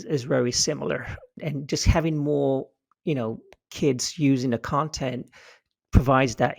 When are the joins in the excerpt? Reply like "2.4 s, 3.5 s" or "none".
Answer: 1.4 s

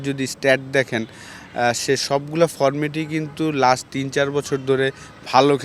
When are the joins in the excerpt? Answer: none

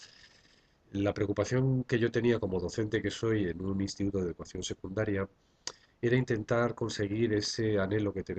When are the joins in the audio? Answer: 4.9 s

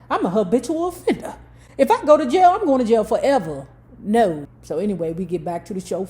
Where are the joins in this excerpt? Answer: 4.5 s

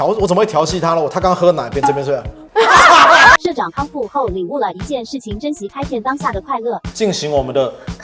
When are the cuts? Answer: 6.9 s

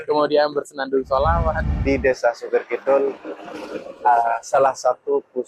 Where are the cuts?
1.7 s

